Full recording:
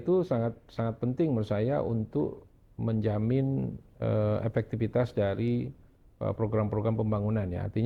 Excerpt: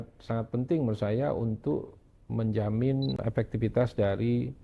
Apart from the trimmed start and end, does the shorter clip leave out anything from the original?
yes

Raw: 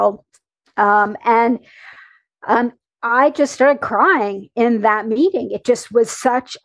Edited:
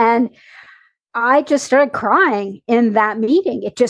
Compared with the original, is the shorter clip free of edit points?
no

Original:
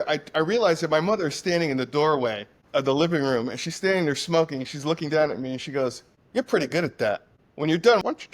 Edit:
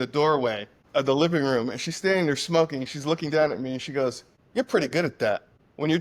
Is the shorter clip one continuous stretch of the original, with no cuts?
yes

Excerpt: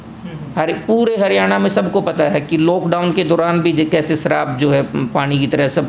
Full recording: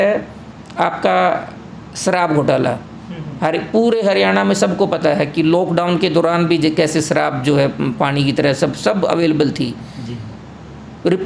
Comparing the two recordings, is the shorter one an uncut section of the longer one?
yes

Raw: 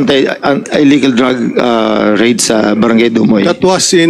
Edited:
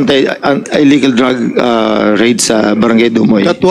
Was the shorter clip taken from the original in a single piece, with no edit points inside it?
yes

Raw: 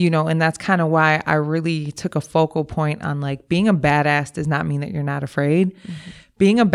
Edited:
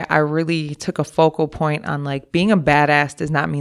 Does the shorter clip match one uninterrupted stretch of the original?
yes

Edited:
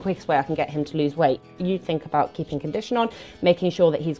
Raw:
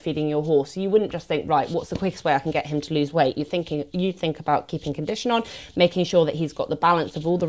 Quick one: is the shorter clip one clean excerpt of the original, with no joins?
no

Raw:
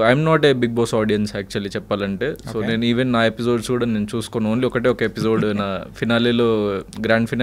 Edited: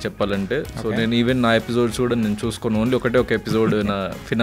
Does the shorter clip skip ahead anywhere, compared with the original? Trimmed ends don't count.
no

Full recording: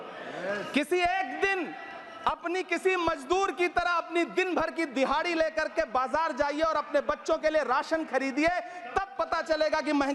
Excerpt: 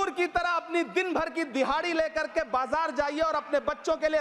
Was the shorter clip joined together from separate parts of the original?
no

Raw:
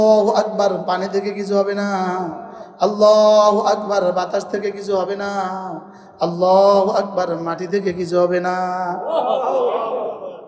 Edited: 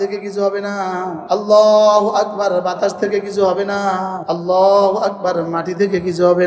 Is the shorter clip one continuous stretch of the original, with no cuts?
no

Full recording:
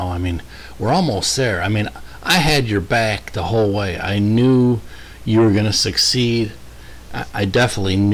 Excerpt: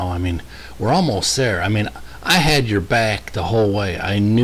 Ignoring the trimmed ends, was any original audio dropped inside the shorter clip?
no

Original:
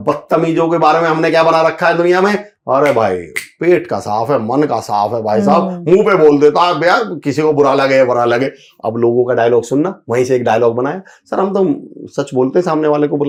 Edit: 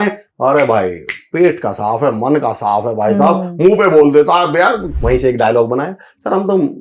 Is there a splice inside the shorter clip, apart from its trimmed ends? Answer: yes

